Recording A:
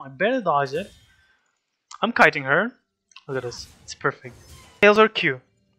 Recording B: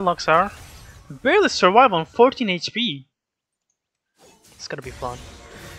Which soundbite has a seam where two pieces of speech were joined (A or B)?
A